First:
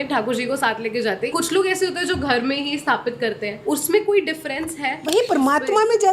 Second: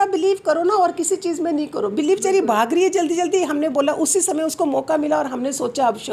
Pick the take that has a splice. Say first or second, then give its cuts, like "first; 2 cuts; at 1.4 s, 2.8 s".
first; 3 cuts; at 1.3 s, 3.5 s, 4.9 s